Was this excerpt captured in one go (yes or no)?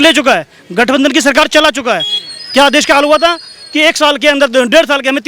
yes